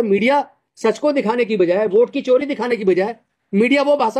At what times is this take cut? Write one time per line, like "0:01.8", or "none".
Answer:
none